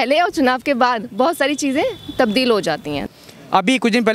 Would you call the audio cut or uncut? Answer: cut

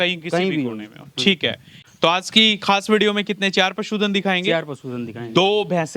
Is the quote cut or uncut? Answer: cut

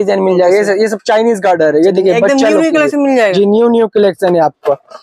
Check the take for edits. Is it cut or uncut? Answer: uncut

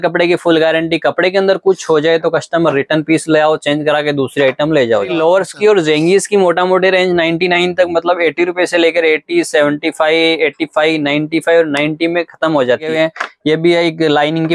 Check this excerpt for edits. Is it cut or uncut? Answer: cut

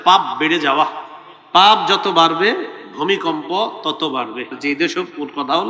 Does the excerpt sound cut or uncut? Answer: cut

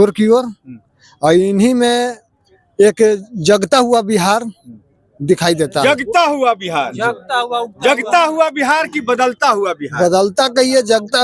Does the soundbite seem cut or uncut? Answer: uncut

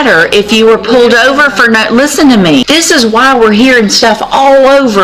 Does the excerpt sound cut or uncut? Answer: cut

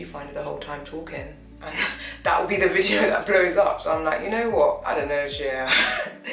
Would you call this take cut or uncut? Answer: uncut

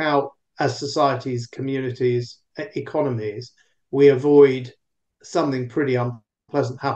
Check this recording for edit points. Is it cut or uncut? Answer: uncut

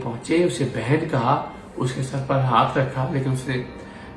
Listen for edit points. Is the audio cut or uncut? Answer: uncut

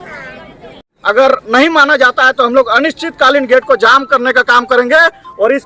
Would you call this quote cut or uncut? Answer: cut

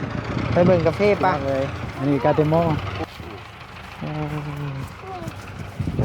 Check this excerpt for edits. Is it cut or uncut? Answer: cut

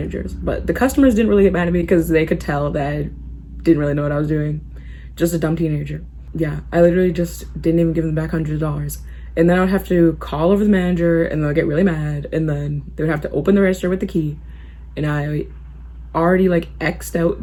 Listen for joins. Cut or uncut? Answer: uncut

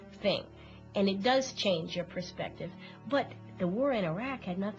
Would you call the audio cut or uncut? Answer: uncut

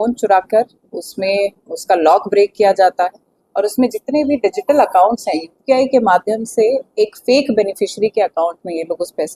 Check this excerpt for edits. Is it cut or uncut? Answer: uncut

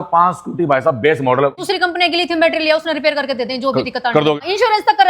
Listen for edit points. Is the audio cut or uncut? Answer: cut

